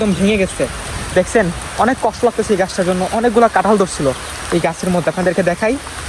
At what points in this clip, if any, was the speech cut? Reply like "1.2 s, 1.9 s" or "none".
none